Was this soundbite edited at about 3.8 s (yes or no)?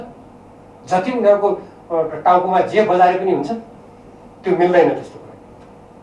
no